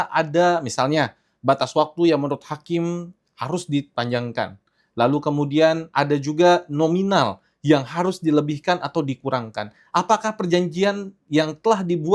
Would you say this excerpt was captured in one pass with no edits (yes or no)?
yes